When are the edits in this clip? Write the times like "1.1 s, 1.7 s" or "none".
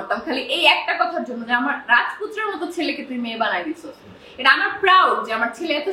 none

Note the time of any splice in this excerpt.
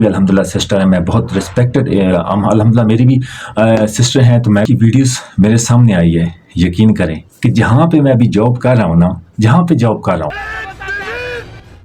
4.7 s

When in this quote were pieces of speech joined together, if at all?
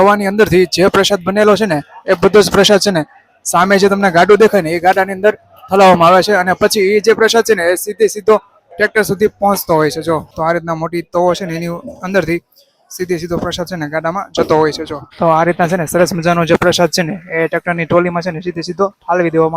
10.3 s, 15.0 s

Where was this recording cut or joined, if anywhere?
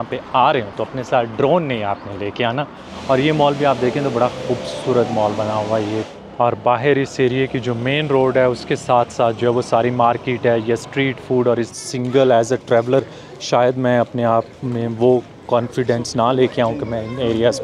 2.9 s, 6.1 s, 11.7 s

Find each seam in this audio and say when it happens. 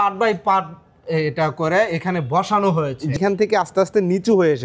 3.2 s

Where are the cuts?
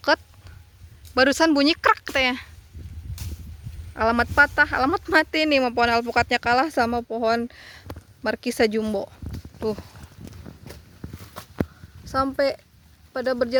none

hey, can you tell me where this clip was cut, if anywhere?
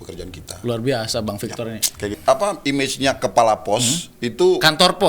2.2 s

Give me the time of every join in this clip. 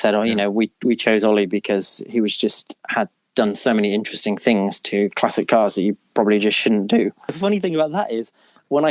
7.3 s

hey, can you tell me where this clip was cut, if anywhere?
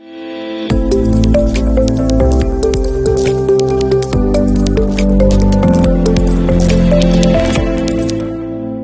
1.1 s

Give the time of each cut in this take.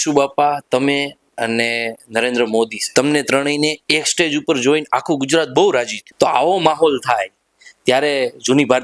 2.8 s, 6.0 s

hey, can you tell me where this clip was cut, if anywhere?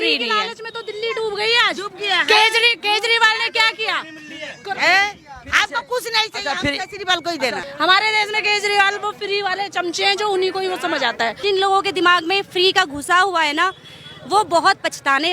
7.6 s, 11.4 s

